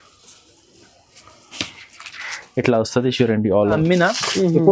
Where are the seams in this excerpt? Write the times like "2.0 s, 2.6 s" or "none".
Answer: 3.7 s